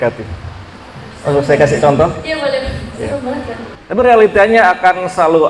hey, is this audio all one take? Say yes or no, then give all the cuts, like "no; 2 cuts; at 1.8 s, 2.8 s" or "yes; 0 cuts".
no; 1 cut; at 3.6 s